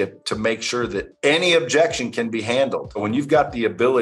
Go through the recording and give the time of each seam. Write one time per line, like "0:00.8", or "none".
0:03.0